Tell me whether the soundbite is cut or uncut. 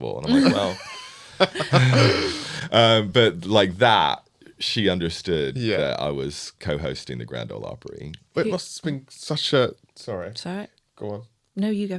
uncut